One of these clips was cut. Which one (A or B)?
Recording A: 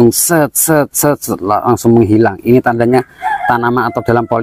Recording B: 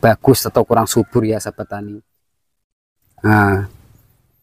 B